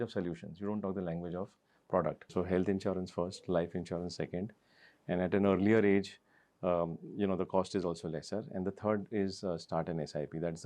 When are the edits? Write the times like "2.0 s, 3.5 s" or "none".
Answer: 2.3 s